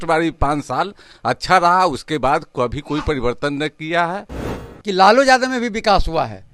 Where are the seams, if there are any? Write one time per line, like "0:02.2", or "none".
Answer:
0:04.5